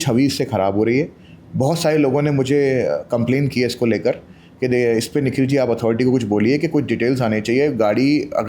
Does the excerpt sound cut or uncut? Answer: uncut